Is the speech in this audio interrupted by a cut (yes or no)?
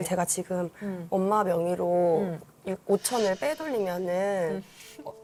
no